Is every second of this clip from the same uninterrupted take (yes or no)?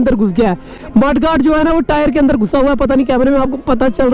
yes